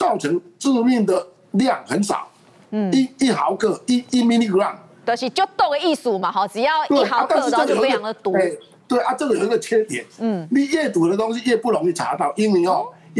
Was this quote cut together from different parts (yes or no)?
no